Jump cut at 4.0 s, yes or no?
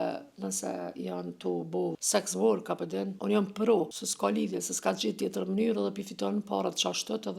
yes